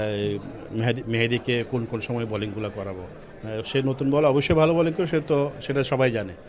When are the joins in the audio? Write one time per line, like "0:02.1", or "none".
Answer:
none